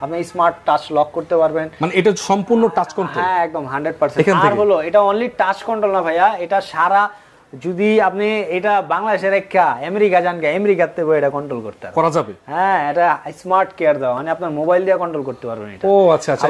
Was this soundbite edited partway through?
no; 0 cuts

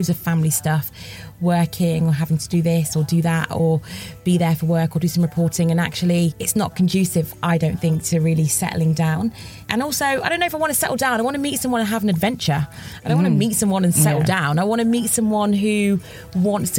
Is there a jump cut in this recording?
yes; 2 cuts; at 6.4 s, 9.7 s

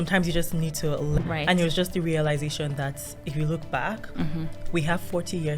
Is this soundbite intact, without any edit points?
no; 1 cut; at 1.2 s

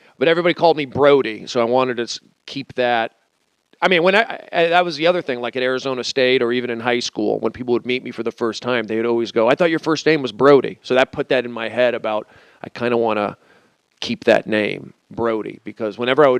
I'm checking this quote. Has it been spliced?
yes; 1 cut; at 5.8 s

